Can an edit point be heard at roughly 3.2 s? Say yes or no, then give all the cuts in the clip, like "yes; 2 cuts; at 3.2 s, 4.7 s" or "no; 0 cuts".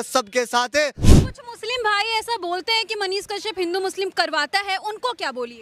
no; 1 cut; at 1.0 s